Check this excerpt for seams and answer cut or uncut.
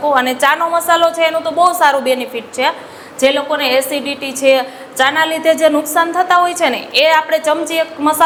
uncut